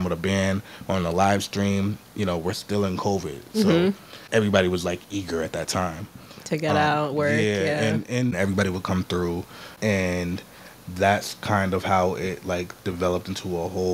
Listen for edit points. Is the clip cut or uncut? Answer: cut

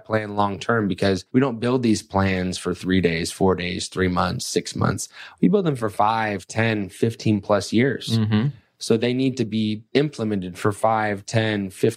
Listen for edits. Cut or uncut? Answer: cut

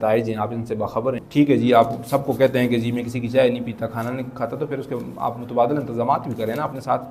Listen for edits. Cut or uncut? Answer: cut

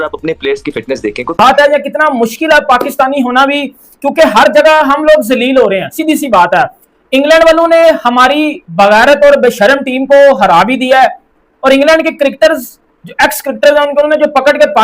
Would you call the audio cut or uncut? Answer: cut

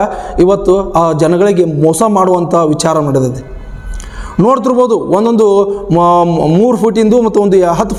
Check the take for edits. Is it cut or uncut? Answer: uncut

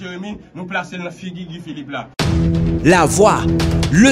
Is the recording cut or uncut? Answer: cut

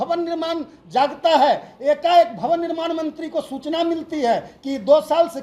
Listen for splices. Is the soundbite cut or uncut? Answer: uncut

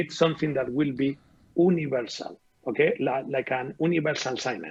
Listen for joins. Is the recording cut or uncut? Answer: uncut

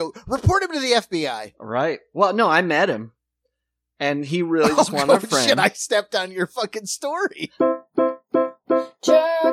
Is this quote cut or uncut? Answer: cut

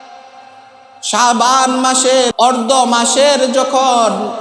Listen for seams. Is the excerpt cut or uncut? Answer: cut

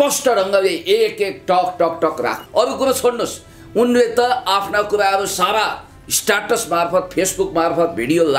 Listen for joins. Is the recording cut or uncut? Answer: cut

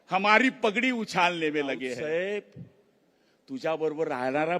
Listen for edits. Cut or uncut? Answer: cut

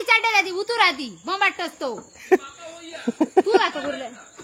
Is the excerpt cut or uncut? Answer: uncut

